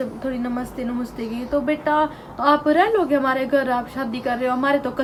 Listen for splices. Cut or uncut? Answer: uncut